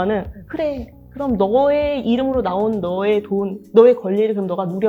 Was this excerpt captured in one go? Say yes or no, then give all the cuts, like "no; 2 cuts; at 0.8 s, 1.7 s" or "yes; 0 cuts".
yes; 0 cuts